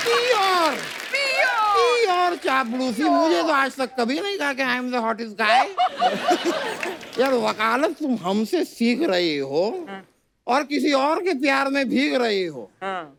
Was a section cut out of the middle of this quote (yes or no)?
no